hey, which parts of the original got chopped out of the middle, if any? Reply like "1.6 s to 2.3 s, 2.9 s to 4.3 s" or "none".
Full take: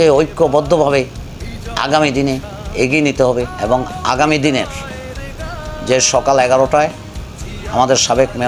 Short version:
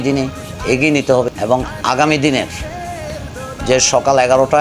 3.4 s to 3.5 s